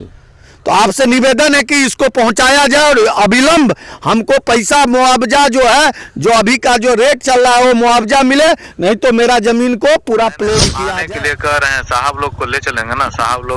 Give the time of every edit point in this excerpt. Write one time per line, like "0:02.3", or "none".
0:10.7